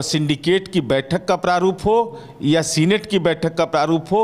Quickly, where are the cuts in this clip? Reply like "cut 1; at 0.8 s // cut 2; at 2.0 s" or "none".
none